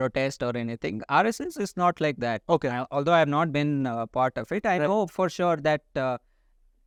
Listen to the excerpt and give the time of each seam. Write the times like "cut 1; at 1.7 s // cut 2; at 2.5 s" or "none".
none